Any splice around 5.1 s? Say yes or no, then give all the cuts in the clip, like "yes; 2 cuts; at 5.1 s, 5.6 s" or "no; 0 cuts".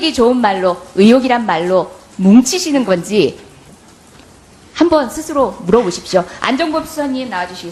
yes; 1 cut; at 5.1 s